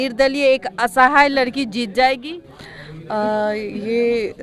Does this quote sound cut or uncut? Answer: uncut